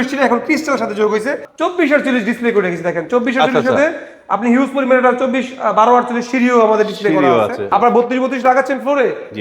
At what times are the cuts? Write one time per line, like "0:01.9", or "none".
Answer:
0:01.5
0:07.6